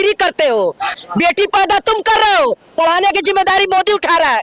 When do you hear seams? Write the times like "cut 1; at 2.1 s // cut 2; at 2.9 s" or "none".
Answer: cut 1; at 0.9 s